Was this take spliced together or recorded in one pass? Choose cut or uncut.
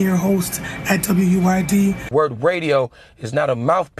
cut